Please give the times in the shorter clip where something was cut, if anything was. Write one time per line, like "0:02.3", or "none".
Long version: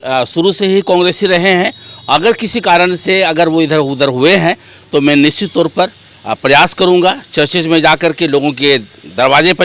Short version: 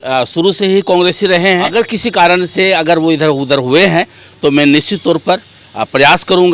0:01.7